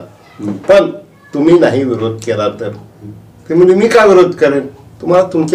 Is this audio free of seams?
yes; 0 cuts

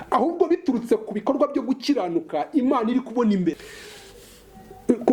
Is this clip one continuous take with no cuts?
no; 1 cut; at 3.5 s

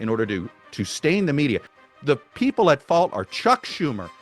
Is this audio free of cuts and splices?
no; 1 cut; at 1.7 s

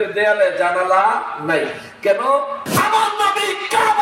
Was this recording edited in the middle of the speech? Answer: yes; 1 cut; at 2.6 s

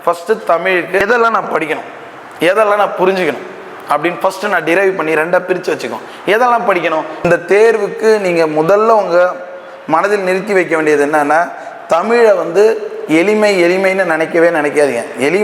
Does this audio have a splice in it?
yes; 2 cuts; at 1.0 s, 7.3 s

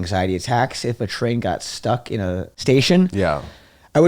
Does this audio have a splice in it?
yes; 1 cut; at 2.5 s

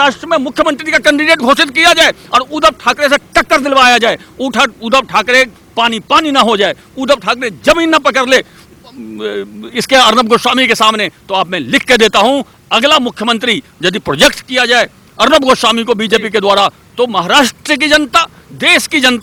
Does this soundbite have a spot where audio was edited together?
no; 0 cuts

